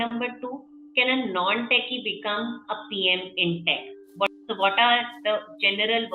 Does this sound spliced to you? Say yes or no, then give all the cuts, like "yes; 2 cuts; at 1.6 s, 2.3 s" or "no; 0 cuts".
yes; 1 cut; at 4.3 s